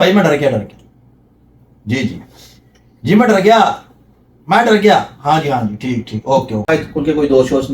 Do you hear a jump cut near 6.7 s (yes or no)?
yes